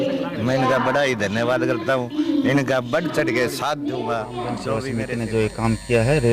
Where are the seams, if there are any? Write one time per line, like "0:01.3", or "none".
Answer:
0:05.0